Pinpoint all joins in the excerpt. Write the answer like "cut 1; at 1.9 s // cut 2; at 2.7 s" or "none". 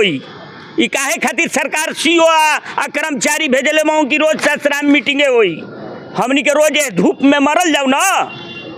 none